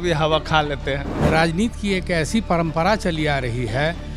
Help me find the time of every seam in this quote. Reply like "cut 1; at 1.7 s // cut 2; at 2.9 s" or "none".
cut 1; at 1.1 s